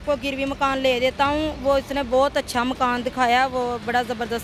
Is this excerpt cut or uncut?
uncut